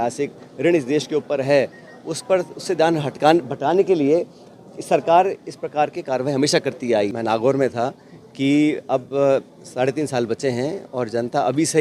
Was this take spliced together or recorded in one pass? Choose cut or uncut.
cut